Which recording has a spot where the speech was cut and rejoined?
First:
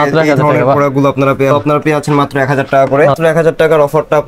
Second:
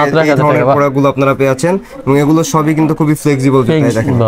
first; 2 cuts; at 1.5 s, 3.2 s

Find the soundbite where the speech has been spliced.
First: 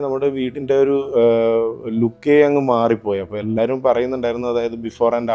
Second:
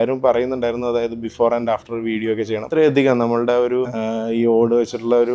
second; 2 cuts; at 2.6 s, 3.9 s

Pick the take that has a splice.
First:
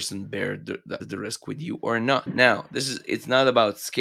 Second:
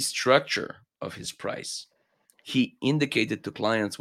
first; 2 cuts; at 1.0 s, 2.3 s

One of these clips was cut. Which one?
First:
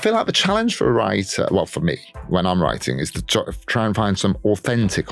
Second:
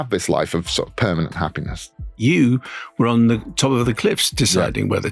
second; 1 cut; at 2.0 s

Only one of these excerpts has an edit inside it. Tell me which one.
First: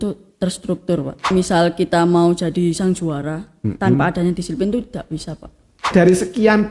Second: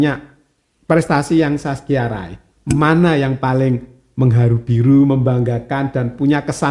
first; 2 cuts; at 1.3 s, 5.9 s

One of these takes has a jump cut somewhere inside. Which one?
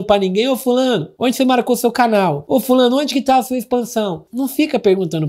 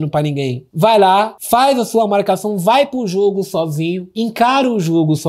first; 1 cut; at 4.2 s

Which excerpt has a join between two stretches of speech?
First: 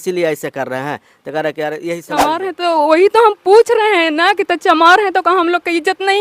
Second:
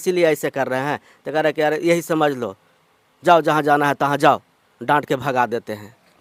first; 1 cut; at 2.2 s

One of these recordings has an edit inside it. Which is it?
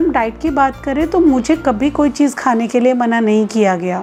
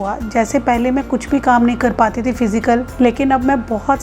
second; 1 cut; at 2.9 s

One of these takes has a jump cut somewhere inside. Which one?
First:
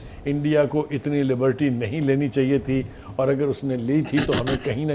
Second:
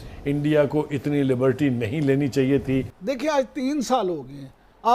second; 1 cut; at 2.9 s

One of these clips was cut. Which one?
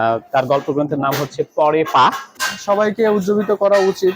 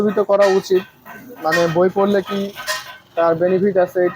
first; 1 cut; at 2.4 s

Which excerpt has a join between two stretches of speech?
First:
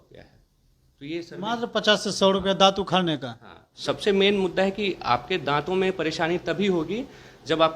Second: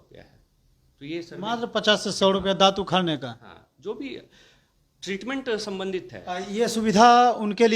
first; 1 cut; at 3.7 s

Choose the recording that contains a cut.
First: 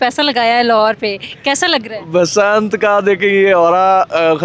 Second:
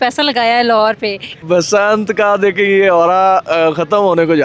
second; 1 cut; at 1.3 s

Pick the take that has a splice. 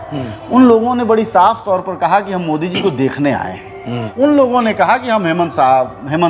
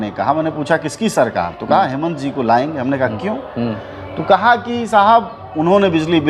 first; 1 cut; at 4.0 s

